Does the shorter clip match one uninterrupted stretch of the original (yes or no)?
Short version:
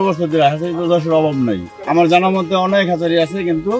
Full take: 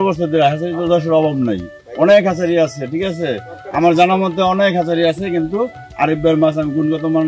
no